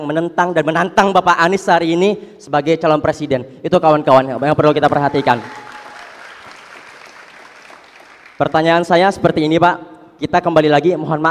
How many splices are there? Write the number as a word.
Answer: zero